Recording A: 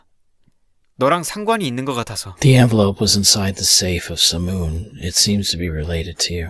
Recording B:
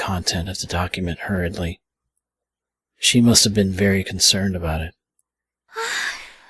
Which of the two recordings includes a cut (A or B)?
B